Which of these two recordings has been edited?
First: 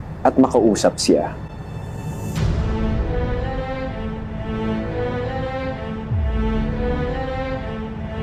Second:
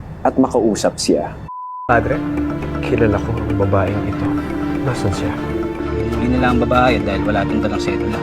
second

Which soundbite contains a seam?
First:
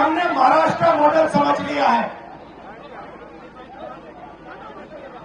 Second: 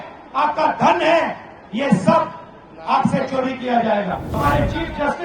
second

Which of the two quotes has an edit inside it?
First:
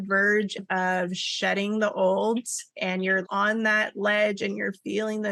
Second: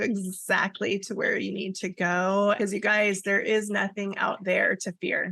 second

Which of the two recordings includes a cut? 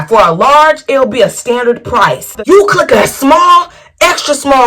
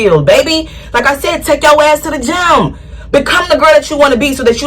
first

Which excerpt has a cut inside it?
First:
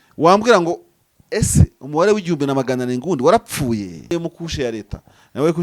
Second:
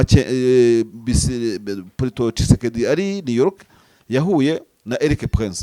first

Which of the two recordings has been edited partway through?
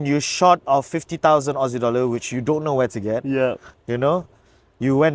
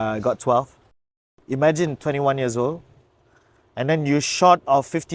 second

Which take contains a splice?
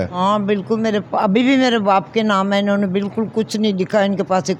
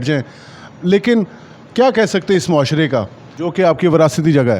second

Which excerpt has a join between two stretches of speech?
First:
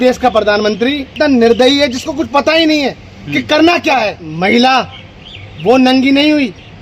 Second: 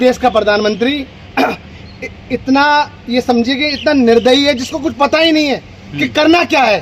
first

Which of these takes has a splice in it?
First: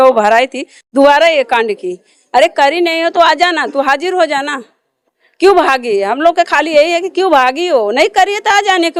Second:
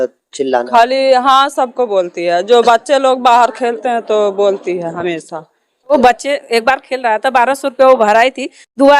second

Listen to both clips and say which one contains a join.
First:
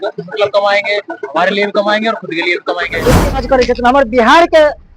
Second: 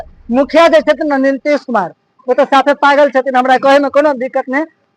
first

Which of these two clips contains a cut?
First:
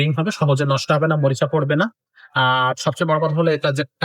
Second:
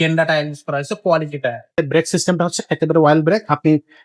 second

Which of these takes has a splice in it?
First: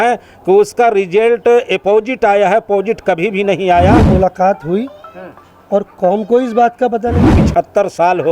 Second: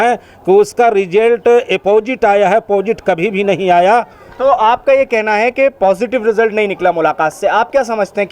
first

